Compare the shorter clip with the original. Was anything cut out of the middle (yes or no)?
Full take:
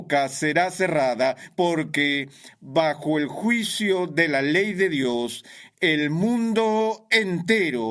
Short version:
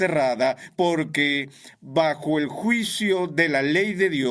no